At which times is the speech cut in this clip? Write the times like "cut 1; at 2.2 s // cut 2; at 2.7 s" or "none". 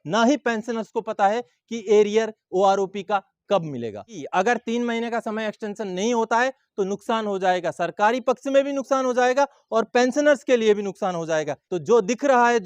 cut 1; at 4.2 s // cut 2; at 11.6 s